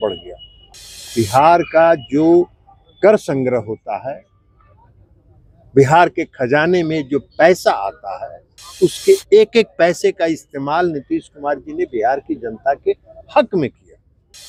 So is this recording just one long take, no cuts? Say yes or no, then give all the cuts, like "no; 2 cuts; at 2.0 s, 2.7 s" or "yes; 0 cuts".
yes; 0 cuts